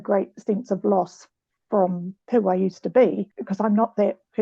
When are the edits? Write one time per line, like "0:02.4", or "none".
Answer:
0:02.1
0:03.3